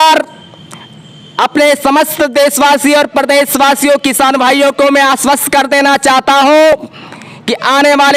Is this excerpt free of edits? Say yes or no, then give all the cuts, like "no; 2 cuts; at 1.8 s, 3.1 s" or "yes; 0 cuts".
yes; 0 cuts